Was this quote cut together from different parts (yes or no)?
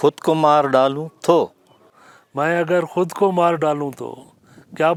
no